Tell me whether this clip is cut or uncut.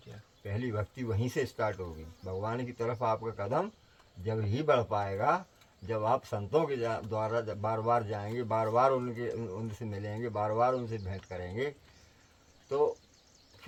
uncut